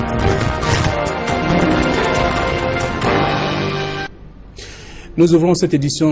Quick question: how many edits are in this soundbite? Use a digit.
1